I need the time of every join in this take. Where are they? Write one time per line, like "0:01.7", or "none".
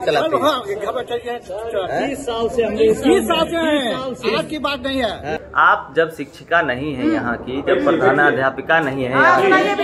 0:05.4